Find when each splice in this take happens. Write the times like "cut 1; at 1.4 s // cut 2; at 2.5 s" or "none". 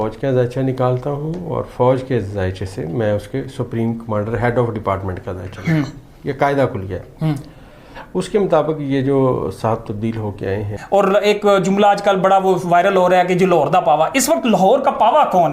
cut 1; at 10.8 s